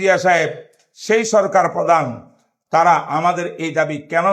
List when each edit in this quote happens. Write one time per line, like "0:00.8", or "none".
none